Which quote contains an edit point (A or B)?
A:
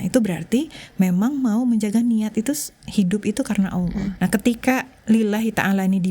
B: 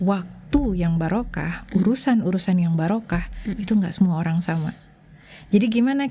A